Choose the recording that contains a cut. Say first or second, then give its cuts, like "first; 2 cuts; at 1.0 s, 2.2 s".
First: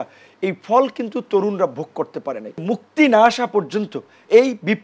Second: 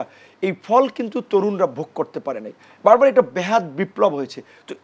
first; 1 cut; at 2.6 s